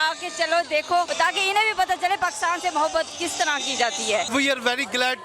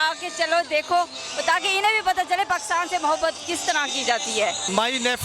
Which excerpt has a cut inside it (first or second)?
first